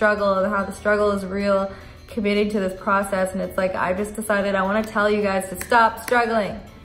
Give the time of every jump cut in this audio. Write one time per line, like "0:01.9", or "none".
none